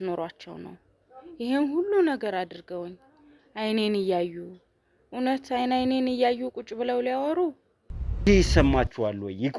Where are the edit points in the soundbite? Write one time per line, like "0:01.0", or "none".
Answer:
0:08.3